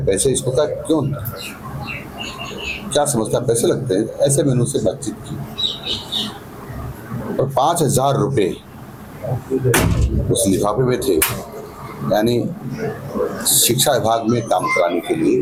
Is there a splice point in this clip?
no; 0 cuts

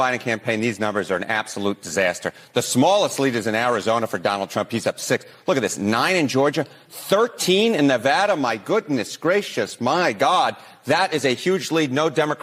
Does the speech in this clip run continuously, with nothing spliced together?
yes; 0 cuts

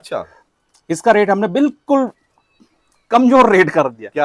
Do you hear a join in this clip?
no; 0 cuts

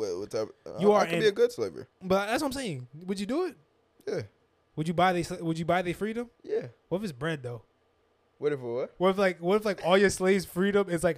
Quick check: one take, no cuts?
no; 2 cuts; at 1.9 s, 6.4 s

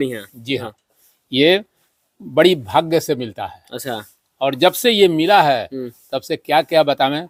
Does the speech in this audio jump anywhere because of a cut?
no; 0 cuts

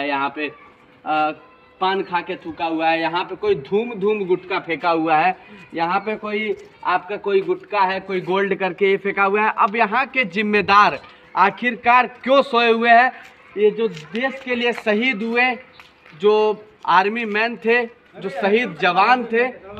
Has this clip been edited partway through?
no; 0 cuts

